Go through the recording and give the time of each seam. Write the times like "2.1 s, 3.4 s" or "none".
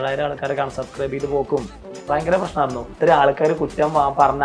2.9 s